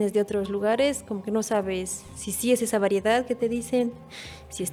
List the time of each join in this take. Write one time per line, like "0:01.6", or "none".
none